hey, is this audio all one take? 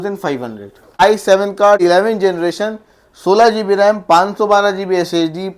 no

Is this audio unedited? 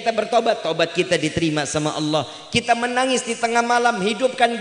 yes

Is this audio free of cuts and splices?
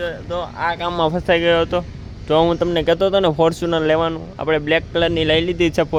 yes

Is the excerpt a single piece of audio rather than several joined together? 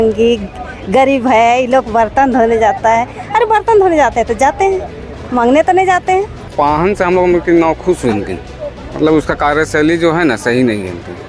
no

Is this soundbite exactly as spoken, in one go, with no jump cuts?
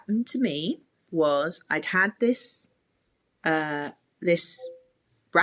yes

